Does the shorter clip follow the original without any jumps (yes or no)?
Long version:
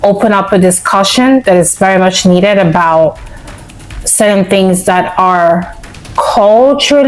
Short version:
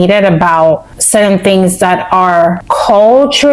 no